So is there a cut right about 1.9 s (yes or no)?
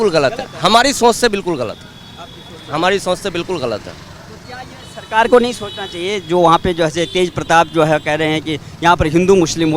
no